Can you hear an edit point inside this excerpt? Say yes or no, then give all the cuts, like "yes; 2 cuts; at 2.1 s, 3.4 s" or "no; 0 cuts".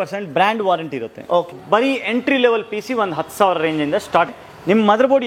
yes; 2 cuts; at 1.5 s, 4.3 s